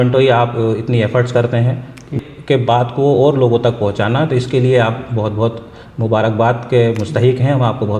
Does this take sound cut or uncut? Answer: cut